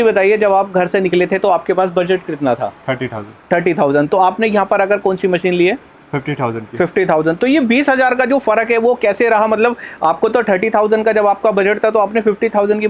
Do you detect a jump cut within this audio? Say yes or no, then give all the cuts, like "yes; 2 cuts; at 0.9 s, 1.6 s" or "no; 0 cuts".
no; 0 cuts